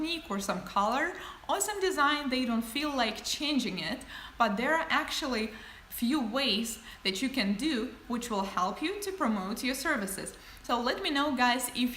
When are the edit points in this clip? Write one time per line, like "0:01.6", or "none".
0:07.0